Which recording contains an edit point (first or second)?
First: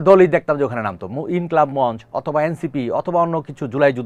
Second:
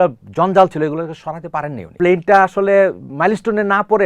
second